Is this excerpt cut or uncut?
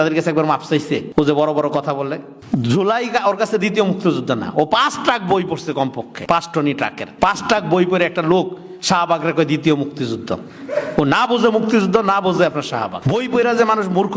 cut